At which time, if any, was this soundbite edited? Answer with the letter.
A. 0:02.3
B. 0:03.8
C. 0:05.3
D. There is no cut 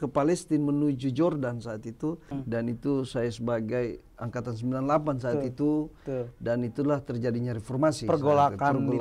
A